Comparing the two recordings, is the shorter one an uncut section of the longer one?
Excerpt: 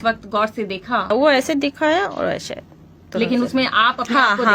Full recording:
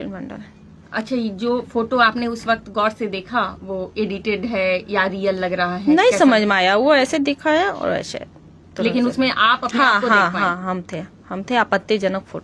no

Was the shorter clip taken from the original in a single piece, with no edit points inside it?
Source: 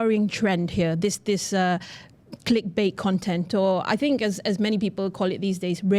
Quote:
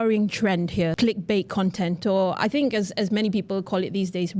no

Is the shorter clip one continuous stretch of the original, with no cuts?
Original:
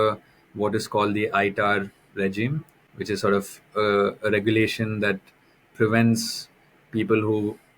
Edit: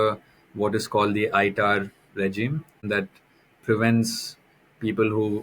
no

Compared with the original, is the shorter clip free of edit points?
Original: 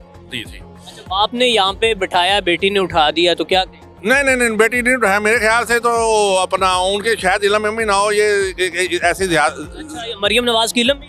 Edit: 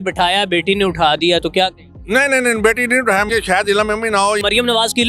no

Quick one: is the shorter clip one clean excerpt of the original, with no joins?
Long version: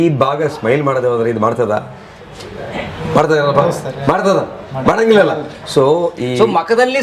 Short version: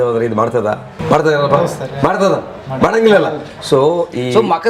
no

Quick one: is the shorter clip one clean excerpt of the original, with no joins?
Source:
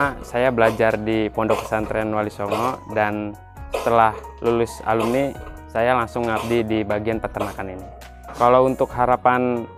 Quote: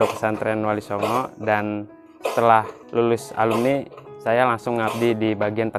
yes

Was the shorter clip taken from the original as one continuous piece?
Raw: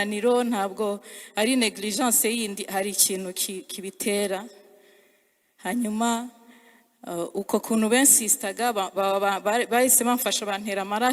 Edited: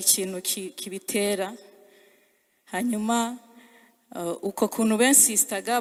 yes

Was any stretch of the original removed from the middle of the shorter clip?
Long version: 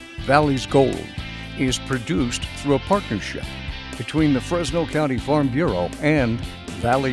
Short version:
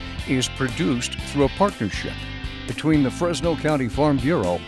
no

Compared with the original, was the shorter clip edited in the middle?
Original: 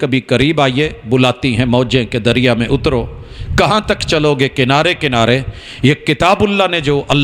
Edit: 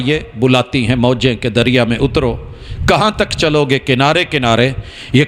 no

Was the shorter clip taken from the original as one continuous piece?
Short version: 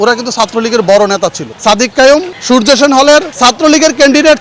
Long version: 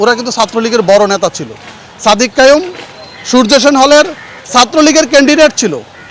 no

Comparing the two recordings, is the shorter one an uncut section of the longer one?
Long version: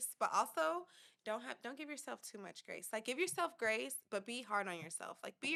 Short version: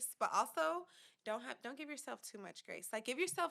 yes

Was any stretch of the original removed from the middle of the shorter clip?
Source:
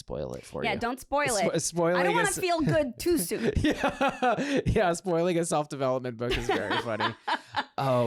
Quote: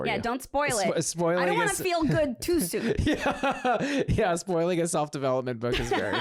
no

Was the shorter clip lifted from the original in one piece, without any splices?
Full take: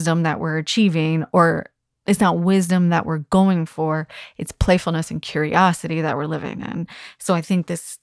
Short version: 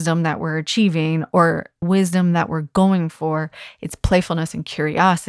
no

